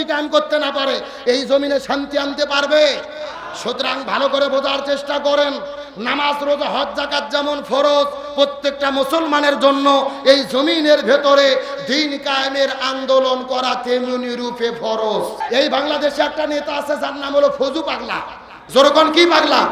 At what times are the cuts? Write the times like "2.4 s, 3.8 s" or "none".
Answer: 15.4 s